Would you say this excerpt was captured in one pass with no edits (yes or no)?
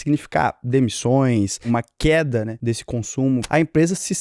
no